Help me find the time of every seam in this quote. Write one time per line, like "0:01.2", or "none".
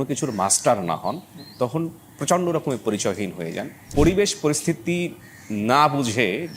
0:03.7